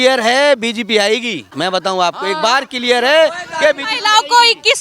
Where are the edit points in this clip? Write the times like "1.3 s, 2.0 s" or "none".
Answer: 1.4 s